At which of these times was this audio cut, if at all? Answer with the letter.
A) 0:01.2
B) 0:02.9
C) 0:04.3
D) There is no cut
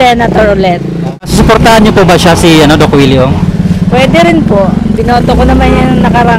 A